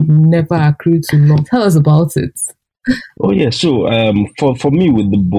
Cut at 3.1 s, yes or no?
no